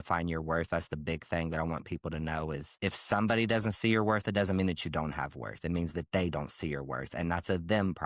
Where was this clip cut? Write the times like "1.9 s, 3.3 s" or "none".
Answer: 2.7 s